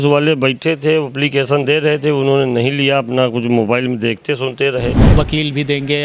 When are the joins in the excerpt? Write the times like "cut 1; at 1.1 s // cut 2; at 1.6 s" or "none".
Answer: cut 1; at 5.0 s